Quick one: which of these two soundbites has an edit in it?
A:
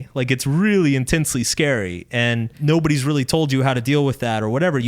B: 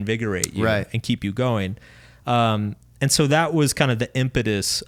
A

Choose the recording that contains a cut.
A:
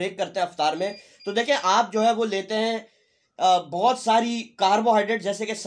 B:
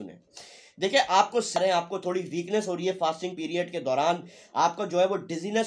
B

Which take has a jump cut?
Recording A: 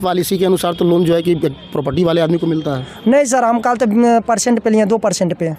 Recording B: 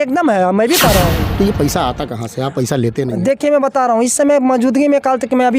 B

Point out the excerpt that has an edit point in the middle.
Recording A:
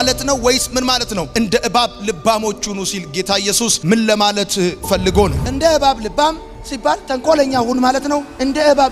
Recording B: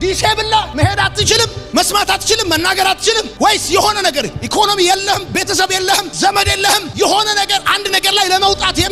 A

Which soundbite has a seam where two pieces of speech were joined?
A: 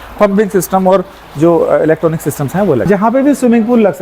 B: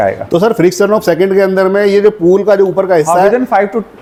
A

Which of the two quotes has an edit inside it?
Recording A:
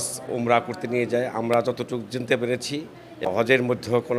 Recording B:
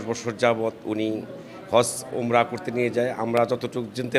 A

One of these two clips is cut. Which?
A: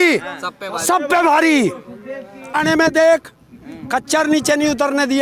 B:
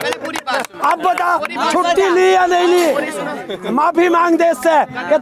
A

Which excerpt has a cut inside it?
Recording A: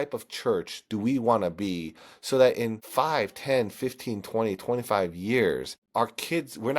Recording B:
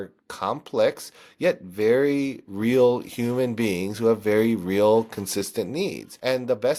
A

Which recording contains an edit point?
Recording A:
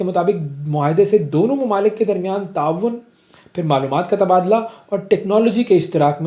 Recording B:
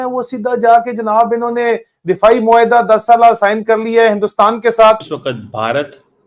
B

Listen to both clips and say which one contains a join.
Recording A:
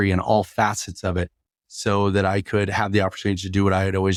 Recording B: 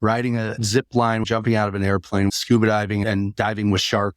B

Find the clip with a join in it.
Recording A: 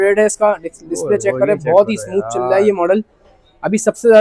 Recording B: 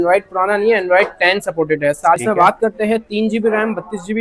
B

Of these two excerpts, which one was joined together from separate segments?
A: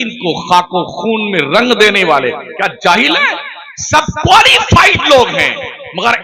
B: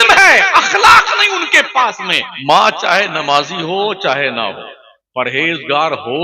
B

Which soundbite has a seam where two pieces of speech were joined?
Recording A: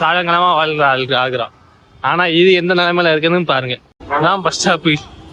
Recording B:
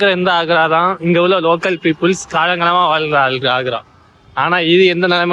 A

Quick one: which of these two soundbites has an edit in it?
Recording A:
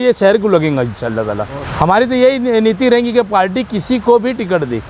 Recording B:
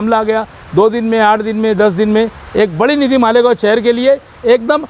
A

